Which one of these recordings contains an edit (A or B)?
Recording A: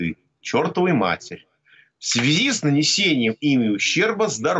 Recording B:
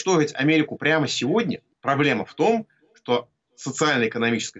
B